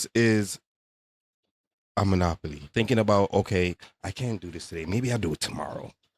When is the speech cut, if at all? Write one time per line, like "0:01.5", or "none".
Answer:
0:02.7